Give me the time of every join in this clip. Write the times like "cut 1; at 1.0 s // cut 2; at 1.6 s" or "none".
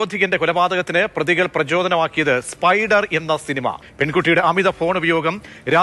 cut 1; at 3.8 s